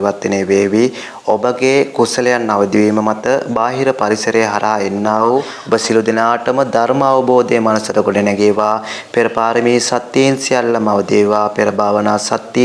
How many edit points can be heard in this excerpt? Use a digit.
1